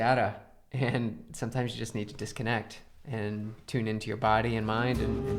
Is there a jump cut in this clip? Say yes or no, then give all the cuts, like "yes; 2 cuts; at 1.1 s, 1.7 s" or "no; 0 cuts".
no; 0 cuts